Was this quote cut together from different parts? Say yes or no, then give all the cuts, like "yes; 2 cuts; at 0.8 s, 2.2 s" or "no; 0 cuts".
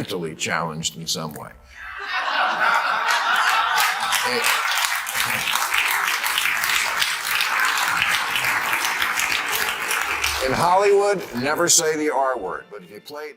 no; 0 cuts